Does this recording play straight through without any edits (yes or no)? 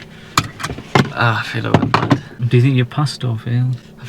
no